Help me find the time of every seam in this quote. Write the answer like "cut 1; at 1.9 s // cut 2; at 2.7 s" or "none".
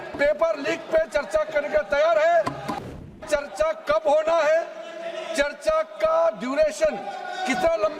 cut 1; at 2.8 s